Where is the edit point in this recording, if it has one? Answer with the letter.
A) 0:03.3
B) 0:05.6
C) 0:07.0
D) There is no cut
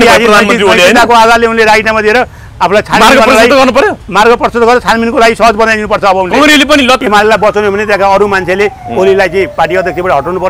C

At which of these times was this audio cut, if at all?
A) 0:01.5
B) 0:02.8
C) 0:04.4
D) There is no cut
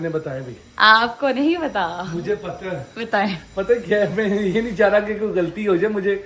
D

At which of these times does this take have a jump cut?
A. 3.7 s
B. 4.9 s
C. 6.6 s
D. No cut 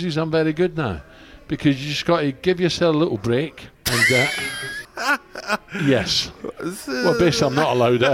B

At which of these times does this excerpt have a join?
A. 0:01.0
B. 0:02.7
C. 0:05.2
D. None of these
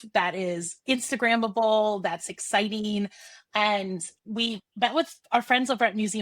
C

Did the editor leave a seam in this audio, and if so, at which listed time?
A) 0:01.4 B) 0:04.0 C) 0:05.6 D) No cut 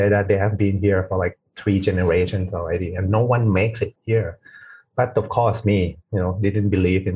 B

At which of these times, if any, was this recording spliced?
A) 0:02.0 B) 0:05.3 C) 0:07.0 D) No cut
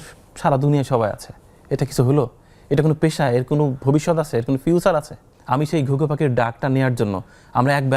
B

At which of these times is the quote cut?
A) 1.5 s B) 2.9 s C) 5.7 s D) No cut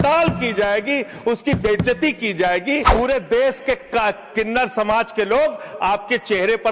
B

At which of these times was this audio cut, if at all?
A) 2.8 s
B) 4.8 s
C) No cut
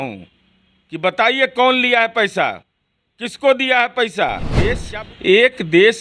B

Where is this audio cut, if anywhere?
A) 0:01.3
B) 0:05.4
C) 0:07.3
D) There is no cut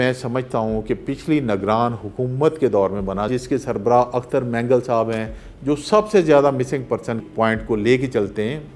C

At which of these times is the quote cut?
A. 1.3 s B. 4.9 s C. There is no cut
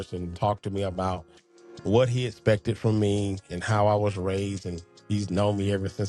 C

